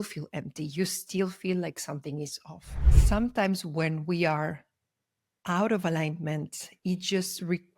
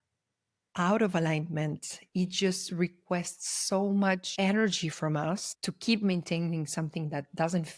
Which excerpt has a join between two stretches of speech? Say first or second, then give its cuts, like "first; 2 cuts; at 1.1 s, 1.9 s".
first; 1 cut; at 2.9 s